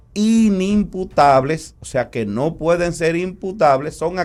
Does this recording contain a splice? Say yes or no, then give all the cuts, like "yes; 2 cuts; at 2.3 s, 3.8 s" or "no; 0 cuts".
no; 0 cuts